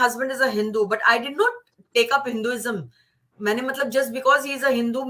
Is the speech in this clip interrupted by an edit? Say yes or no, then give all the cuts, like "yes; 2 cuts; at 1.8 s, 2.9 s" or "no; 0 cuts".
no; 0 cuts